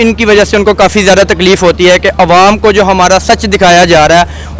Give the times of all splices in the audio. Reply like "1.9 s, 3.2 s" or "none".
none

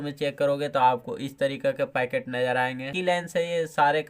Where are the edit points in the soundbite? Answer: 3.0 s

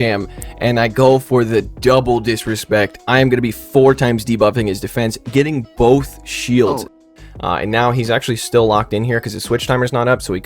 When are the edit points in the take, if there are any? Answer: 6.9 s

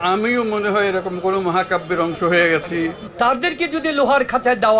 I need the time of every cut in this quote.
3.0 s

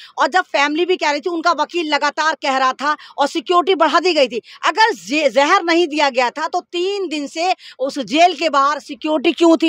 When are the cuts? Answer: none

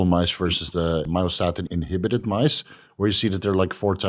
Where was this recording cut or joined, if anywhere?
1.3 s

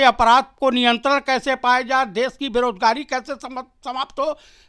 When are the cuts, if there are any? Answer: none

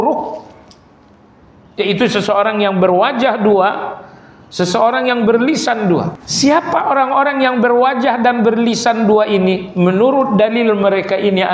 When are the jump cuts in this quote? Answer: 6.2 s

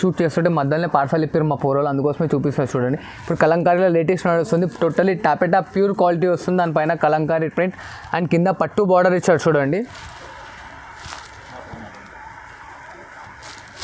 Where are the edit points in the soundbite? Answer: none

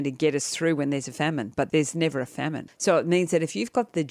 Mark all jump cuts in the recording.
1.7 s, 2.7 s

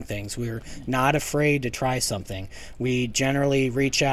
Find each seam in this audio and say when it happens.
none

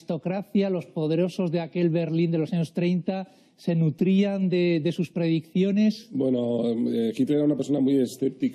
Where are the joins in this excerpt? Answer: none

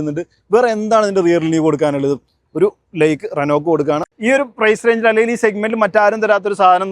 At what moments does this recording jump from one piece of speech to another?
4.1 s

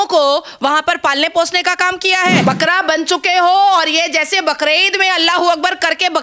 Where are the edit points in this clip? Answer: 2.4 s

